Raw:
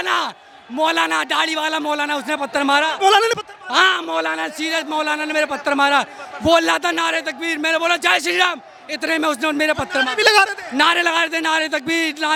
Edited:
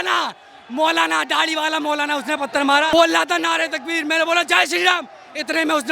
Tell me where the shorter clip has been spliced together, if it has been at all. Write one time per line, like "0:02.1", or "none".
0:02.9